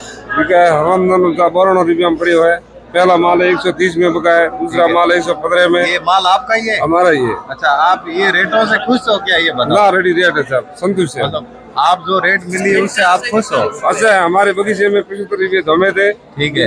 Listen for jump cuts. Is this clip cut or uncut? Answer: uncut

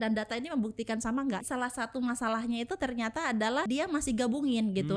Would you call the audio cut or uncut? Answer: cut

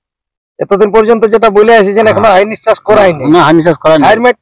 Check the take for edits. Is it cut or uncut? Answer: uncut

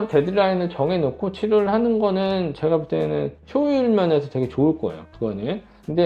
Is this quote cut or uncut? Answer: uncut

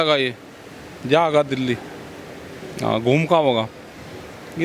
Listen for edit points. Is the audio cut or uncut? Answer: uncut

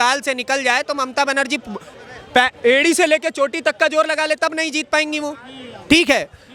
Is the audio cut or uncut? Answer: uncut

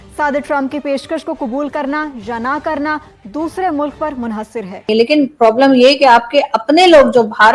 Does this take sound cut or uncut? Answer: cut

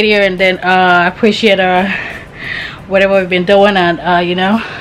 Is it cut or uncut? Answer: uncut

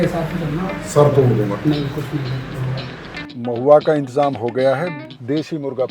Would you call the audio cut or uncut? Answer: cut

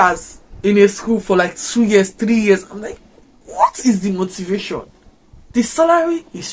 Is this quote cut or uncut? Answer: uncut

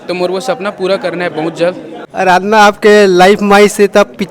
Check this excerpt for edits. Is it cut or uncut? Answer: cut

